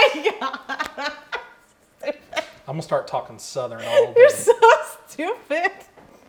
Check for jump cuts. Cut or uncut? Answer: uncut